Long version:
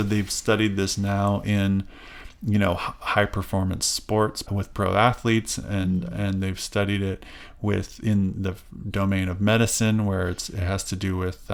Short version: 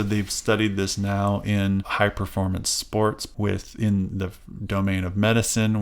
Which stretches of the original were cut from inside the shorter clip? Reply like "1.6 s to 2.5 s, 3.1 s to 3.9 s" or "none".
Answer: 1.9 s to 3.0 s, 4.4 s to 7.5 s